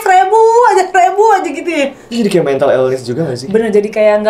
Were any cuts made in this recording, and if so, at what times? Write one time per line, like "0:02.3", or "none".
none